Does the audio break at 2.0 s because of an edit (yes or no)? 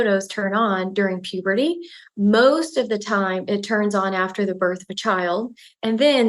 yes